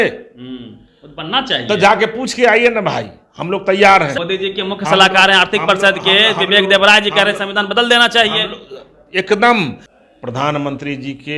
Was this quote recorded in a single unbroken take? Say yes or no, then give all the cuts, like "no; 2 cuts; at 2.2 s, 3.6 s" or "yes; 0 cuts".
no; 2 cuts; at 4.2 s, 9.8 s